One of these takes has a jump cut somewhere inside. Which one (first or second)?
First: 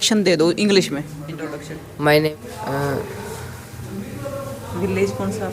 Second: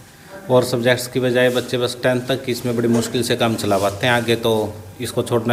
first